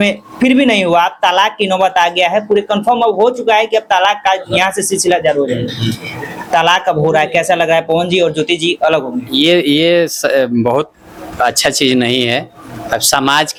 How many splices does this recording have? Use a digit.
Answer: 0